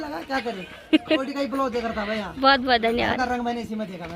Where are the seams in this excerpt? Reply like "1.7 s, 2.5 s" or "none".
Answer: 1.2 s